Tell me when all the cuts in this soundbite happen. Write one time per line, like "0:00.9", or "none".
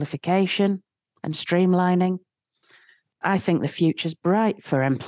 0:03.1